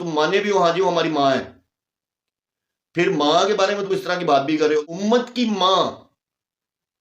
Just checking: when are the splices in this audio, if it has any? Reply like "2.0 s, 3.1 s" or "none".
4.8 s